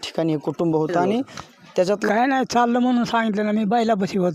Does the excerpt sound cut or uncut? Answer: cut